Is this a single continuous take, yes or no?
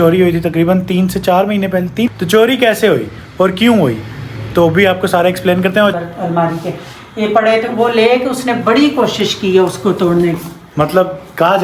no